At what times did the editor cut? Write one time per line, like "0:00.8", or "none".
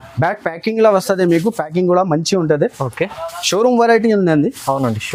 none